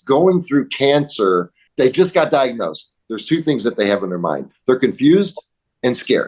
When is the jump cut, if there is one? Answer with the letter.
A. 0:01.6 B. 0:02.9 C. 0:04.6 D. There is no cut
A